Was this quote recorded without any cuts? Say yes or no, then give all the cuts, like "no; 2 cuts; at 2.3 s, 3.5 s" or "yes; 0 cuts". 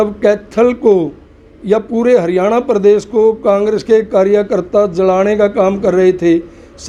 yes; 0 cuts